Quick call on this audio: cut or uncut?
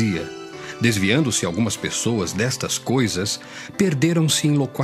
cut